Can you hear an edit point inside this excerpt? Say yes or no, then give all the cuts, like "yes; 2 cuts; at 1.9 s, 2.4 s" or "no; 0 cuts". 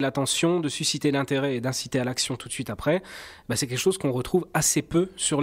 no; 0 cuts